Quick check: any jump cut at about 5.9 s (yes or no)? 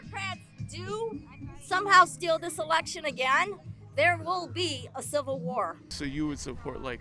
yes